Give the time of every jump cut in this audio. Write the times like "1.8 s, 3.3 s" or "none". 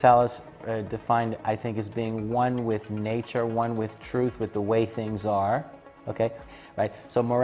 6.4 s